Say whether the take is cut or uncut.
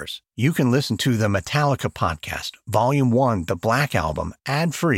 uncut